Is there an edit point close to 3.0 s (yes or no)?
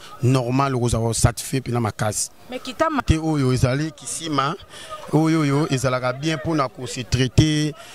yes